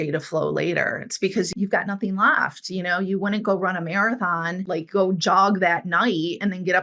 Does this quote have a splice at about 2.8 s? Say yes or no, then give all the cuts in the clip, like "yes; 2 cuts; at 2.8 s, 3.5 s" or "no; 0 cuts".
no; 2 cuts; at 1.5 s, 4.6 s